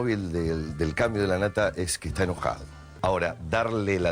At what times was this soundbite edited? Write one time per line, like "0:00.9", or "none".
0:02.9